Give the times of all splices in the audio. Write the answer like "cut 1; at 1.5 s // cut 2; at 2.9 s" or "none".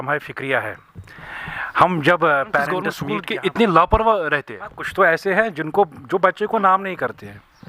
cut 1; at 3.0 s